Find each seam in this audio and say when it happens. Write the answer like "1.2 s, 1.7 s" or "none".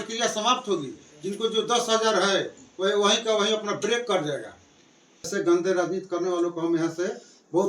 5.3 s